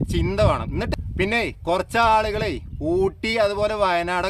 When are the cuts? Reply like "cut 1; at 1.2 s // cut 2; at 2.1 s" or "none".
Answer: cut 1; at 0.9 s